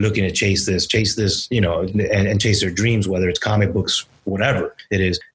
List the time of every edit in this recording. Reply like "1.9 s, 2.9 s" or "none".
none

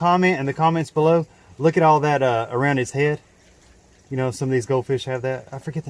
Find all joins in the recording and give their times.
none

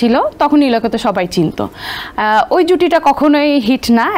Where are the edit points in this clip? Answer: none

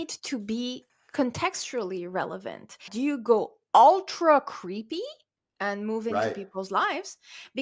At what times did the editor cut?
2.9 s

